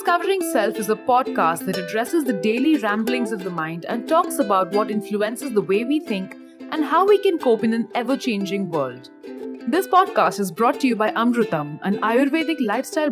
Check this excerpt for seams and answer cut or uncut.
uncut